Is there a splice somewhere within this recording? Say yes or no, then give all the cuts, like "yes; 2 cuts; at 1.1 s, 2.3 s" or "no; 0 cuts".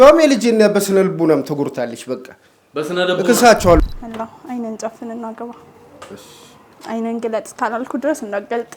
yes; 1 cut; at 3.8 s